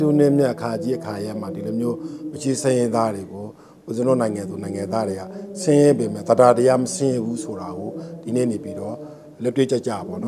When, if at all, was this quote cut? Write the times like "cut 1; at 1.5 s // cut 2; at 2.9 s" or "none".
none